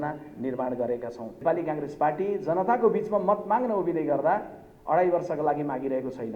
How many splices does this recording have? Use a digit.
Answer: 1